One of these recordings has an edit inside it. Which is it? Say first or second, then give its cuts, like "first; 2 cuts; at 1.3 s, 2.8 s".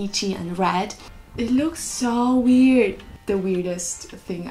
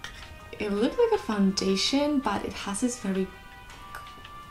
first; 1 cut; at 1.1 s